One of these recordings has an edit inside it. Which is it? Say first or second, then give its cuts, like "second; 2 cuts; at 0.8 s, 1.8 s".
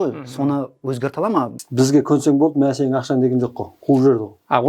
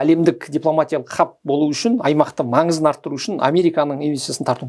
first; 1 cut; at 1.6 s